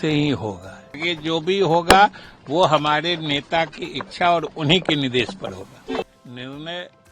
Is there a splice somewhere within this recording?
yes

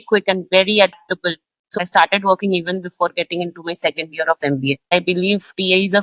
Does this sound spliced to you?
yes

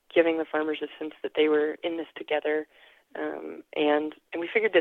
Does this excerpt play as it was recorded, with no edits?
yes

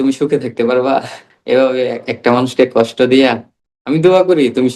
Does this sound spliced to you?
no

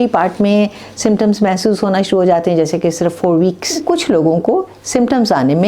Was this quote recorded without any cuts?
no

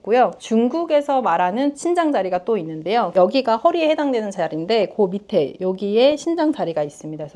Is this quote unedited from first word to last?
no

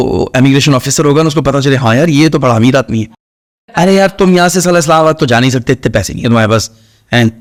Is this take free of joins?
yes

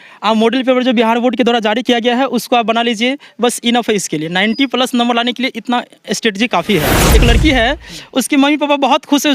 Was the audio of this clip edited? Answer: yes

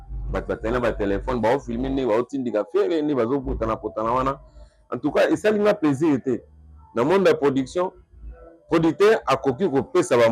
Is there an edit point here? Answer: no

